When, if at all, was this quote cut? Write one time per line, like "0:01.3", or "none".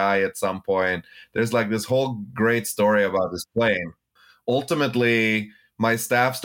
0:04.0